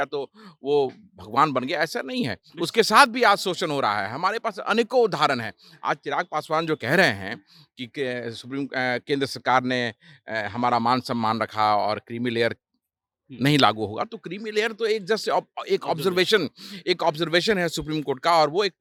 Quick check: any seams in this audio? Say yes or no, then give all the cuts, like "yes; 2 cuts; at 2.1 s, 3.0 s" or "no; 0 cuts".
no; 0 cuts